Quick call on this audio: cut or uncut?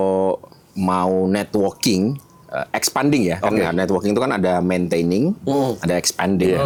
uncut